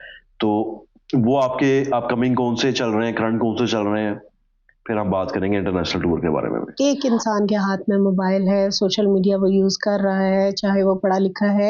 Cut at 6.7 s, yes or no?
yes